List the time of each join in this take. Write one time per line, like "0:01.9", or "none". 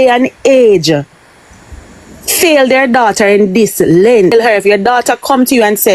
0:04.3